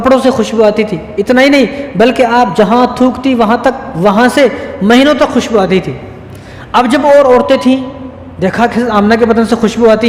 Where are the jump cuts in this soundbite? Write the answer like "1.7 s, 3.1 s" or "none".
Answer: none